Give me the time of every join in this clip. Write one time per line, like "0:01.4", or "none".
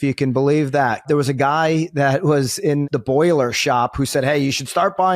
0:01.1
0:02.8

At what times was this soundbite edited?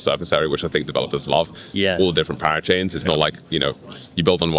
none

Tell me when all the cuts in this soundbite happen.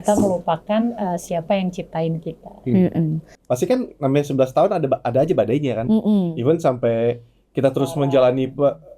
0:03.4

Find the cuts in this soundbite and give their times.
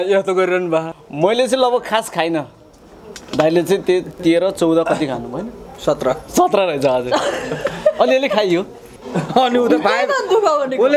0:01.0
0:09.0

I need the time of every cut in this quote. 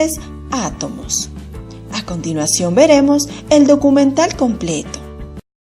0:03.4

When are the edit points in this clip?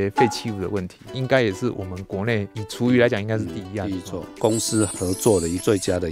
0:01.0
0:04.3

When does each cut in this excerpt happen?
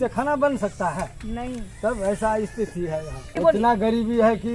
0:03.3

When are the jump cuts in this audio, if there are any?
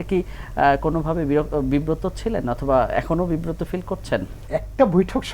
0:04.4

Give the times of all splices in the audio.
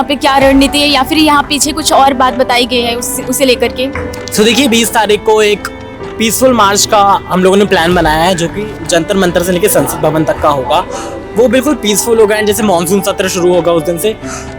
none

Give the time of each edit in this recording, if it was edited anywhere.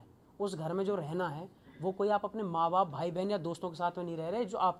none

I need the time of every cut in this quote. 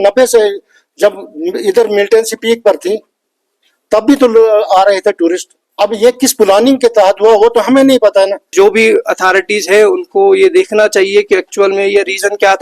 0:08.5

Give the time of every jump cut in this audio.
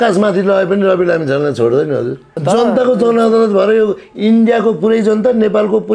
0:02.3

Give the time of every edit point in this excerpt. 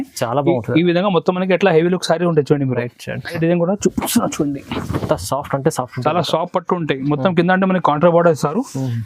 0:03.4

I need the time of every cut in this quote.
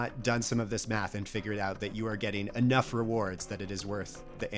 none

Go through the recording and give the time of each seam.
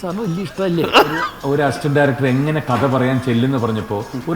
0:01.3

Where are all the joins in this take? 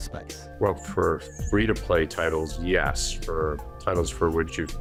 none

